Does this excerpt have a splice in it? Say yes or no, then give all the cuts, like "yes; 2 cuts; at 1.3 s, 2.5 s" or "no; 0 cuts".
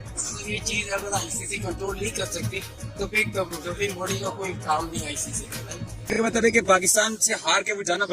yes; 1 cut; at 6.1 s